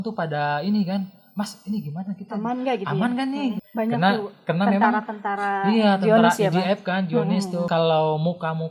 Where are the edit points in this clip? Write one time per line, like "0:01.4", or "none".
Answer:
0:03.6
0:07.7